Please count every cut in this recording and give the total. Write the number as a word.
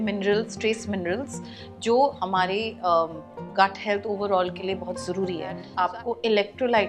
one